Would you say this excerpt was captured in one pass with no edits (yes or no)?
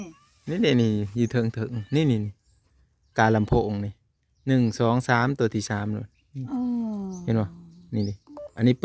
yes